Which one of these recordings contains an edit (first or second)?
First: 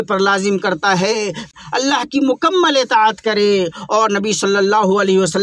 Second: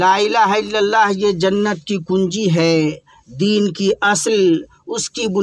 first